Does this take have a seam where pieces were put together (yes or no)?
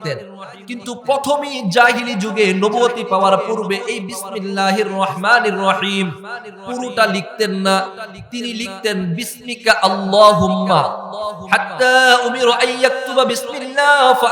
yes